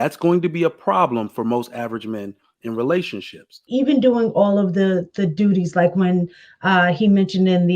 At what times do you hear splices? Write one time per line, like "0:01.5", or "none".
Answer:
0:03.6